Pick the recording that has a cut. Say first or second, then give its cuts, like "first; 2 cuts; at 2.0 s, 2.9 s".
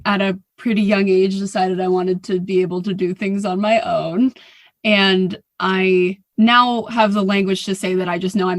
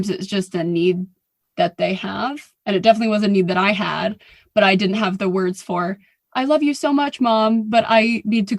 first; 1 cut; at 6.2 s